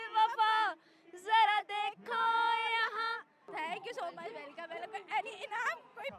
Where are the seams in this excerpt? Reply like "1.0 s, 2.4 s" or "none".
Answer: none